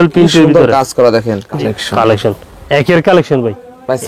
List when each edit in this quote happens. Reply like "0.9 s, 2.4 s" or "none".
1.5 s